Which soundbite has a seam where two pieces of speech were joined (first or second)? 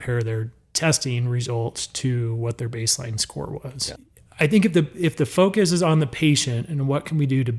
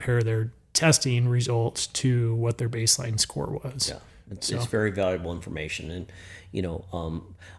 first